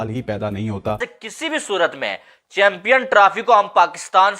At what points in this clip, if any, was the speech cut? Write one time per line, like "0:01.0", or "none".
0:01.1